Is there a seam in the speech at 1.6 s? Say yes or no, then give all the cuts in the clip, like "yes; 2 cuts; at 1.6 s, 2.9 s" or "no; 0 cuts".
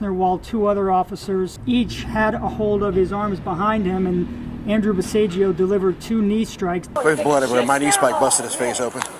yes; 2 cuts; at 1.6 s, 7.0 s